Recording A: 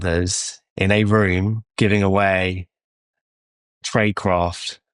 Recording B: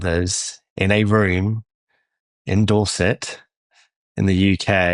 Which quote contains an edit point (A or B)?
A